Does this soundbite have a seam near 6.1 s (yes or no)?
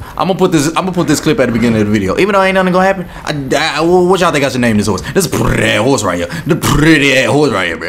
no